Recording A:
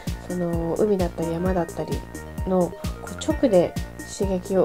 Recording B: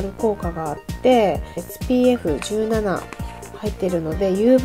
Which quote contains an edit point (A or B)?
B